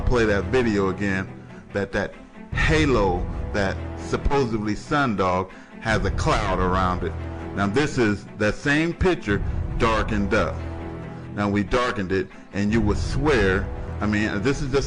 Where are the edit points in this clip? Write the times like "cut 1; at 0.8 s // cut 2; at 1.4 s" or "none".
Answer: none